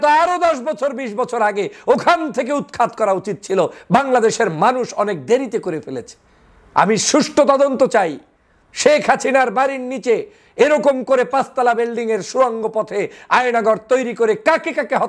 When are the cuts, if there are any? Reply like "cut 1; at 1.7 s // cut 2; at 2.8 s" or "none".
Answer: none